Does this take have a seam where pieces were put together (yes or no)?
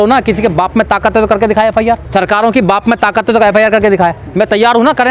yes